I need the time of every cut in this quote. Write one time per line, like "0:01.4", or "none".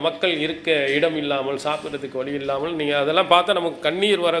none